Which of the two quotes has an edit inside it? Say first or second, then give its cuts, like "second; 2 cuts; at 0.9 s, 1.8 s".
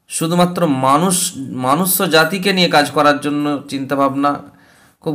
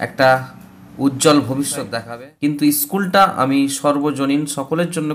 second; 1 cut; at 2.0 s